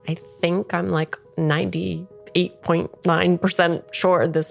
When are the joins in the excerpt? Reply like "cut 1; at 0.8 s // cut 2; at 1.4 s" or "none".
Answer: none